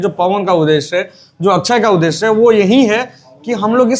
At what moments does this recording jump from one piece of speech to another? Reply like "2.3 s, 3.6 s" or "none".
none